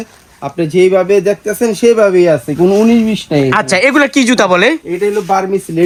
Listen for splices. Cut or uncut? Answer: uncut